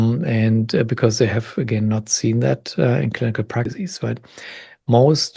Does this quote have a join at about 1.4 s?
no; 1 cut; at 3.7 s

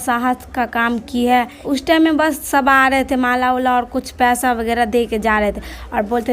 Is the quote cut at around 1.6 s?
yes; 1 cut; at 1.6 s

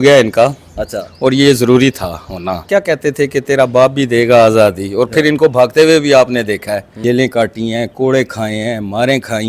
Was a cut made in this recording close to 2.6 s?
yes; 2 cuts; at 2.6 s, 6.9 s

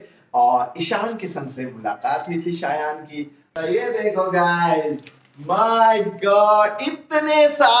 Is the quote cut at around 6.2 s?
no; 1 cut; at 3.5 s

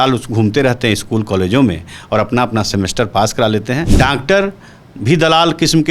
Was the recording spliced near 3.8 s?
yes; 1 cut; at 3.8 s

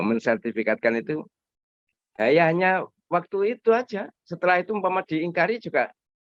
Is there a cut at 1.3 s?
no; 0 cuts

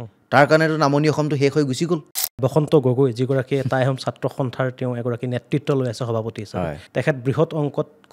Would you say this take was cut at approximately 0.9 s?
no; 2 cuts; at 2.4 s, 6.8 s

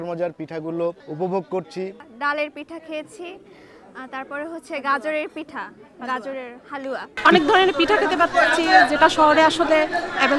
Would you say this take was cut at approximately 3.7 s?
no; 3 cuts; at 1.0 s, 2.0 s, 7.1 s

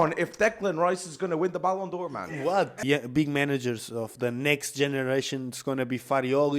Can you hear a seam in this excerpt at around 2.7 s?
yes; 1 cut; at 2.7 s

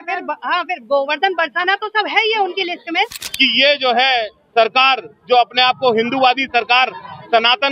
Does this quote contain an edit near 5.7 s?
no; 1 cut; at 3.3 s

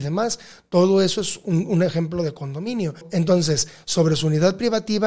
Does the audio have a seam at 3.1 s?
yes; 1 cut; at 3.1 s

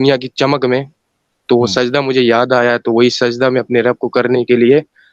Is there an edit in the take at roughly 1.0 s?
no; 0 cuts

